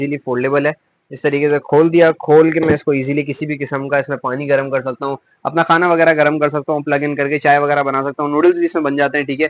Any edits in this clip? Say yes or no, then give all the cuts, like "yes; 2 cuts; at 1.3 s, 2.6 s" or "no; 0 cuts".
no; 0 cuts